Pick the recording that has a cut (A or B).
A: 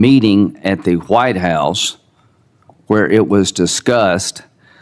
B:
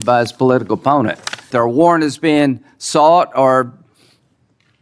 B